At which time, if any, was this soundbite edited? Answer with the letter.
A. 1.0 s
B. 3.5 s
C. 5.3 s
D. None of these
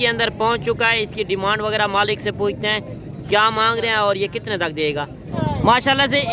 C